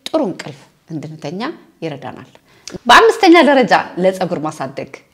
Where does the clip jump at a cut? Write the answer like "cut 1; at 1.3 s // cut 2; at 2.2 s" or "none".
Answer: none